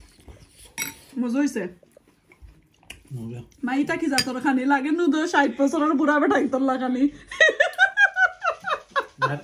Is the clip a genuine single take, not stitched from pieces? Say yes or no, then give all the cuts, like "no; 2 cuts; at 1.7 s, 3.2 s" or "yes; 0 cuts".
yes; 0 cuts